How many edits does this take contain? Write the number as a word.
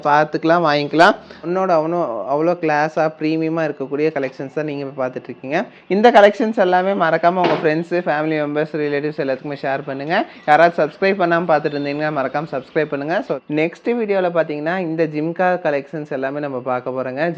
three